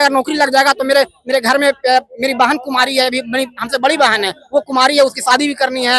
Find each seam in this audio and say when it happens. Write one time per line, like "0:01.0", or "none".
none